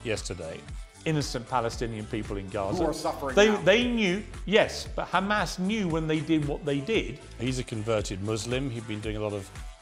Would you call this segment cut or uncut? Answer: uncut